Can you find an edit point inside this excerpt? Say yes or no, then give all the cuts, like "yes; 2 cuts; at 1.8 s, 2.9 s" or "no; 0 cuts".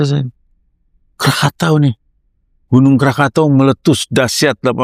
no; 0 cuts